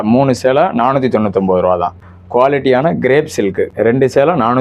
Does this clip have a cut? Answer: yes; 2 cuts; at 2.0 s, 3.7 s

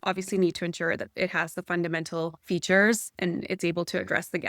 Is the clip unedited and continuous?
no; 2 cuts; at 2.4 s, 3.1 s

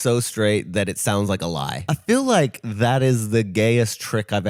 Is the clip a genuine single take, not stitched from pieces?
no; 1 cut; at 1.8 s

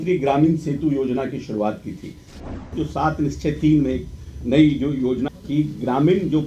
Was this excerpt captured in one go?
no; 2 cuts; at 2.5 s, 5.3 s

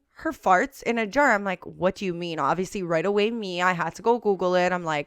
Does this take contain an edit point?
no; 0 cuts

